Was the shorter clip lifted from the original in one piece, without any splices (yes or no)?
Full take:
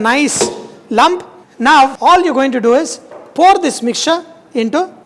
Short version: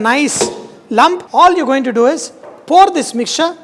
no